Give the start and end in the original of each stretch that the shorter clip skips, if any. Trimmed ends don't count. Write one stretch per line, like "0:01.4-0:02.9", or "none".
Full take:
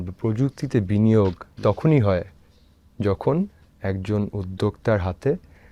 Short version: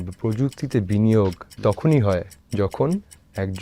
0:02.4-0:02.8